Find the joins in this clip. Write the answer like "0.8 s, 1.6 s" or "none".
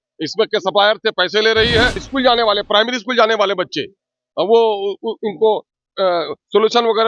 2.1 s